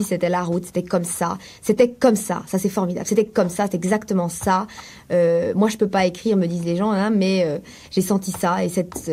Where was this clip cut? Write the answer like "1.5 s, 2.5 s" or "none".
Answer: none